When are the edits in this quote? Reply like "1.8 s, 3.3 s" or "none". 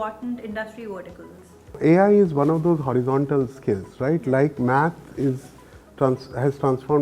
1.8 s